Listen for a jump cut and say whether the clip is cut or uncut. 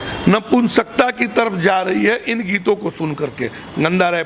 uncut